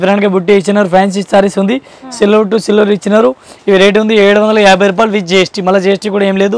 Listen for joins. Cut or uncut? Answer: uncut